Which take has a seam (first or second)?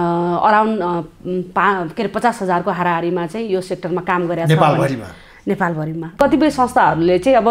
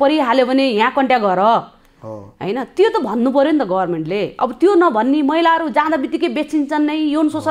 first